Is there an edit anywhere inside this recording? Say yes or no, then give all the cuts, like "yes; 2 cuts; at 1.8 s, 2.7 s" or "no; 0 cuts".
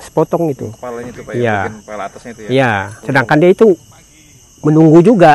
yes; 1 cut; at 2.9 s